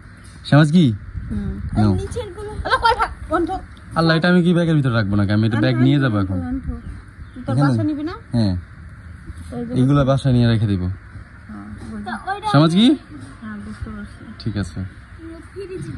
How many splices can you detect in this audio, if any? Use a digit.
0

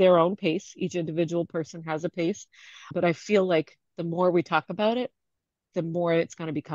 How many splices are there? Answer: 1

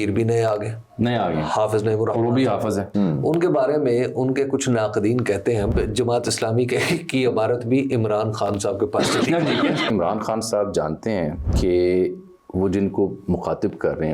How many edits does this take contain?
4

